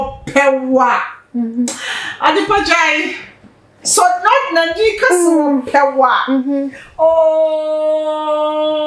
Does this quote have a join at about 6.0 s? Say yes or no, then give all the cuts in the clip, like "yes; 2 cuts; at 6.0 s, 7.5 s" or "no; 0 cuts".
no; 0 cuts